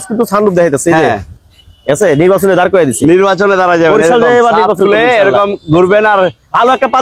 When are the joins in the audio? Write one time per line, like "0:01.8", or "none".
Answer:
none